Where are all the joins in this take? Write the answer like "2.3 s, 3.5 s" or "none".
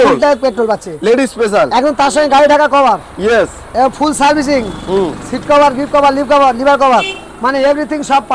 none